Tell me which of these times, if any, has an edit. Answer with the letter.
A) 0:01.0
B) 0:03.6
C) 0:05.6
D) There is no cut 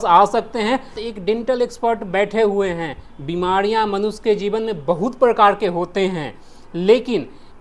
A